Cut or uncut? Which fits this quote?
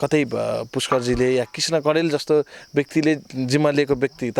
uncut